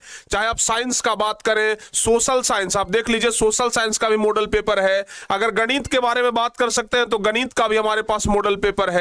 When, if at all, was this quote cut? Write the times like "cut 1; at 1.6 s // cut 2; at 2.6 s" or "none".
none